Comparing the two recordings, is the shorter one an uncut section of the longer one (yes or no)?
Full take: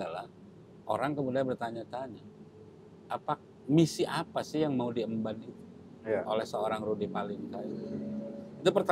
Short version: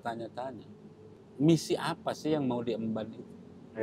no